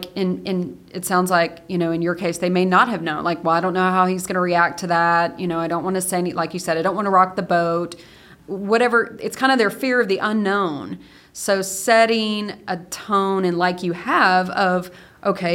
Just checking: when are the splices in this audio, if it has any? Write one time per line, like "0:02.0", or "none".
0:08.3